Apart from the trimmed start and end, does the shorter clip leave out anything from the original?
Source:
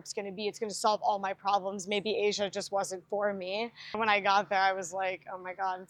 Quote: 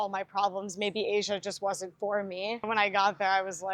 yes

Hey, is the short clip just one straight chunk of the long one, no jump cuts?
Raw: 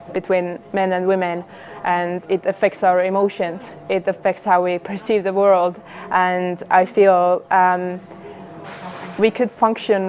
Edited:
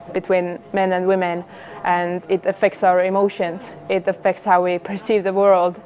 yes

